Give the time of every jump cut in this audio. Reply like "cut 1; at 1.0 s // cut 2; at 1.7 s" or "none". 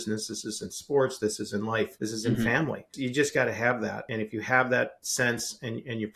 cut 1; at 1.9 s // cut 2; at 2.9 s // cut 3; at 4.0 s // cut 4; at 5.0 s